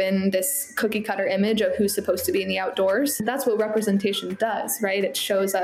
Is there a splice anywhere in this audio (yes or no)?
yes